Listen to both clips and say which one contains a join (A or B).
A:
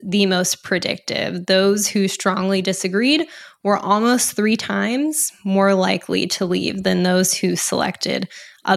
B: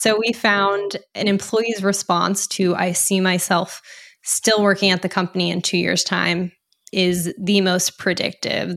B